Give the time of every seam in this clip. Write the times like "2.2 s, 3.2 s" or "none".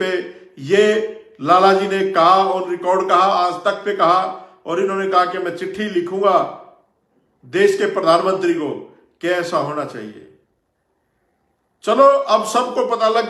none